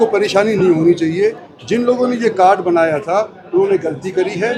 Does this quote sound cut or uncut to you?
uncut